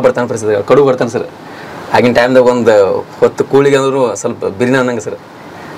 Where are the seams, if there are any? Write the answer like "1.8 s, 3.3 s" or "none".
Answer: none